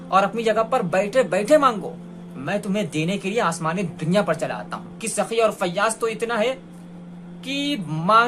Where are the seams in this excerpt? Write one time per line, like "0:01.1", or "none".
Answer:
0:05.1